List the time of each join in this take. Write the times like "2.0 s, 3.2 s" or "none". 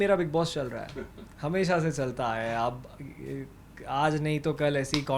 none

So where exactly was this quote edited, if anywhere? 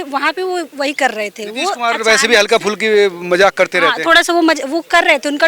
none

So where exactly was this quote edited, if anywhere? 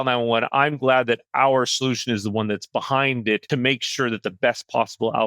3.4 s

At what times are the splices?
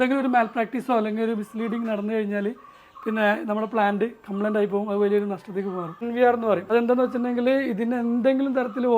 6.0 s, 6.6 s

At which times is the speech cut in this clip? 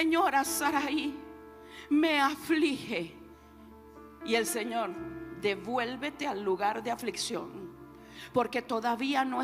none

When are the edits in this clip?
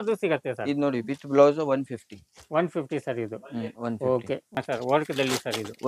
4.6 s

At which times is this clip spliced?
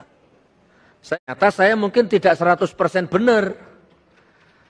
1.1 s

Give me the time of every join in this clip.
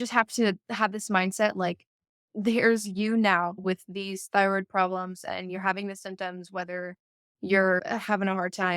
3.6 s, 7.8 s

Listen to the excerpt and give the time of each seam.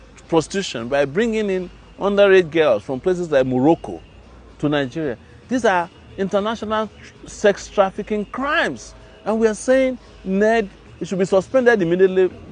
none

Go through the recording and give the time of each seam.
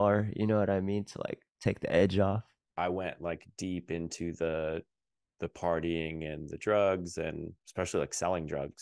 2.6 s, 7.6 s

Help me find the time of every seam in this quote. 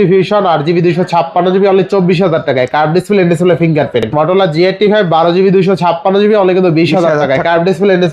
4.1 s

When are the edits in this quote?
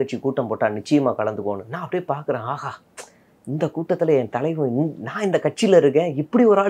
none

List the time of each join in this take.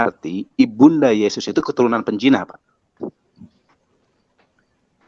none

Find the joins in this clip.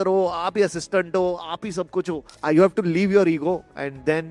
2.2 s

